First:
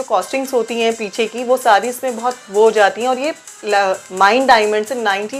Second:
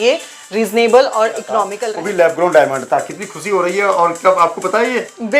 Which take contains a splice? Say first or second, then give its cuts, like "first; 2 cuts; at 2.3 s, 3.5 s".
second; 1 cut; at 1.8 s